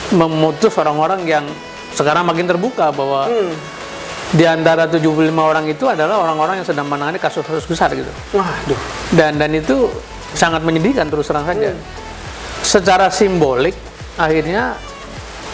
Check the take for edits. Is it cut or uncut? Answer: uncut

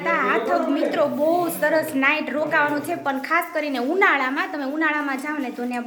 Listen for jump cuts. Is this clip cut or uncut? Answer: uncut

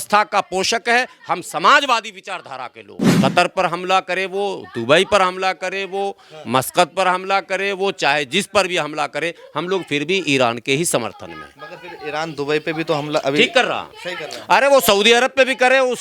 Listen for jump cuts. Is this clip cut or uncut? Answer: cut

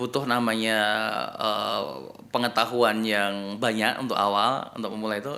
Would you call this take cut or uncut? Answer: uncut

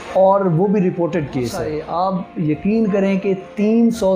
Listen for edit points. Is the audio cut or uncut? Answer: cut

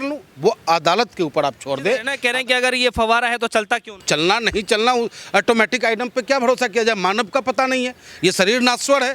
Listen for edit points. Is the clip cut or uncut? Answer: cut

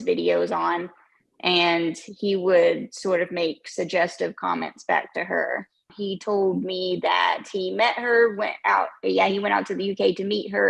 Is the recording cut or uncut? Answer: cut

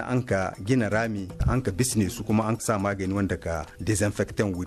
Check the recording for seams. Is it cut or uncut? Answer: cut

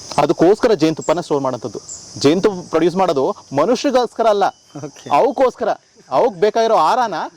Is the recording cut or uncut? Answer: uncut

